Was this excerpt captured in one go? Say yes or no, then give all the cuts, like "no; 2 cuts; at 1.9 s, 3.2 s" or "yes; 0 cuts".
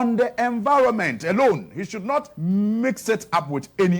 no; 1 cut; at 2.3 s